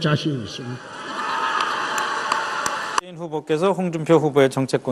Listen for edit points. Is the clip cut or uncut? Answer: uncut